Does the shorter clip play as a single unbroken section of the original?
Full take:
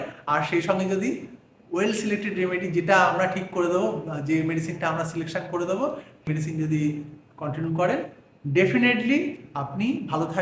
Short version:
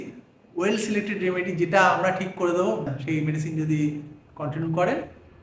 no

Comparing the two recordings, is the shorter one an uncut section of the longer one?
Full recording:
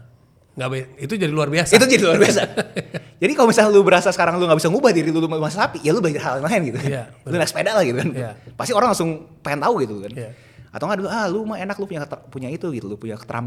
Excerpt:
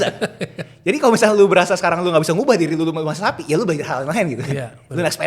yes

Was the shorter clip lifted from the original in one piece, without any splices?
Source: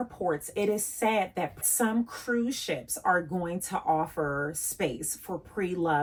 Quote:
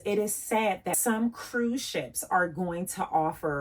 no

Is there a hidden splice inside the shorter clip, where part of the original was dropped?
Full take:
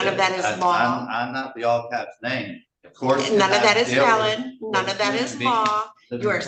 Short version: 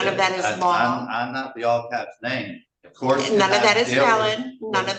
no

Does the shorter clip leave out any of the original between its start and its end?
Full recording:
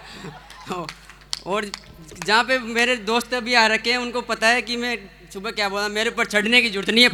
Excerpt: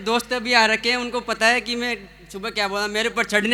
no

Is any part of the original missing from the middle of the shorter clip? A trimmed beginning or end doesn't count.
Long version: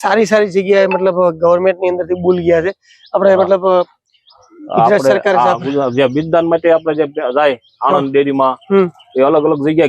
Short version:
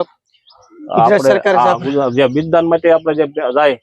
no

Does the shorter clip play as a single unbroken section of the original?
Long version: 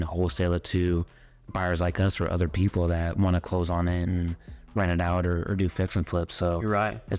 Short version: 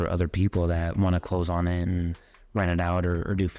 yes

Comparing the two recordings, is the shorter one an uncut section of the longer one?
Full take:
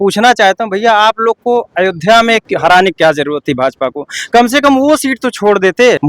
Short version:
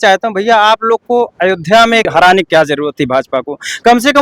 no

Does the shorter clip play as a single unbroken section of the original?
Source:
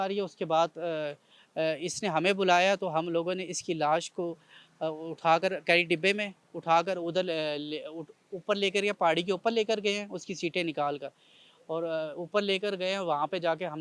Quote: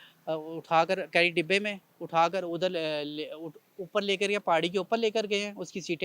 yes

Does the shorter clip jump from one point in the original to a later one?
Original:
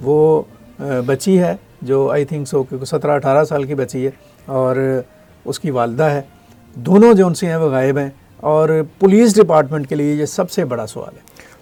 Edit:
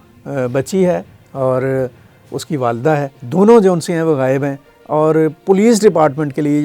yes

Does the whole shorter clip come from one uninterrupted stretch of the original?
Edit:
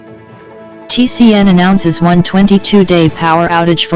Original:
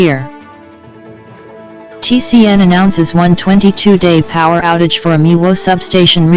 no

